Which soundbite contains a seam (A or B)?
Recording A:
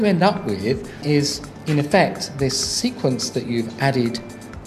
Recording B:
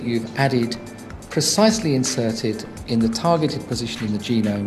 A